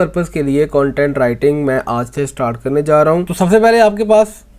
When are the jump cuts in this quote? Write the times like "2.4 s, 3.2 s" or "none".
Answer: 3.3 s